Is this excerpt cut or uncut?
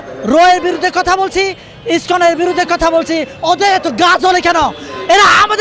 uncut